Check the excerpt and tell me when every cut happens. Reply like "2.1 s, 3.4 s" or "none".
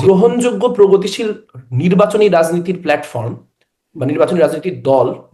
none